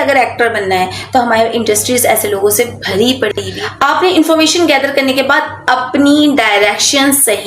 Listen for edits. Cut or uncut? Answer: cut